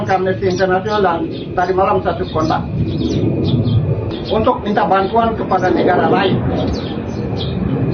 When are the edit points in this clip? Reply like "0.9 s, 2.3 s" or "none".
4.1 s